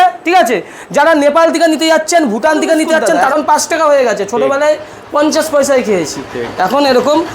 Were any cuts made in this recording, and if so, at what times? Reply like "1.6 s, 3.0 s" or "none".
3.2 s